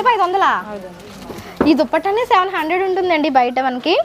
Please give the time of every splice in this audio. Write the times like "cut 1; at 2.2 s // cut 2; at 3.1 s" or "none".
none